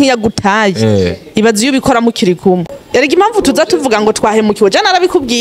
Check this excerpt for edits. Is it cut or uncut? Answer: cut